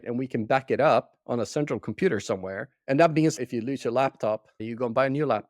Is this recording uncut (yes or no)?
no